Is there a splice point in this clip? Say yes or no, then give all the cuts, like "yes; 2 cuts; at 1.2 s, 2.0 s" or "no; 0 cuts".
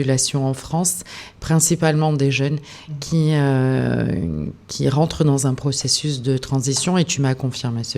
no; 0 cuts